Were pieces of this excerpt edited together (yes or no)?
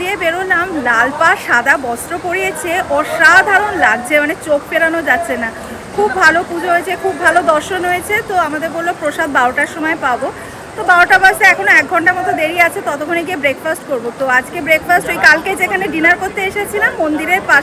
no